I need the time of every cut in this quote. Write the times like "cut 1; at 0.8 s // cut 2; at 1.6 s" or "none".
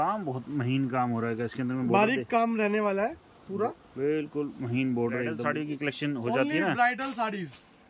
cut 1; at 5.6 s

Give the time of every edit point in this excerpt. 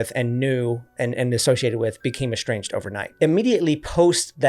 cut 1; at 3.1 s

